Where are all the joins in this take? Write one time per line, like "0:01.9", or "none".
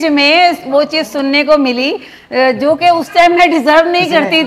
none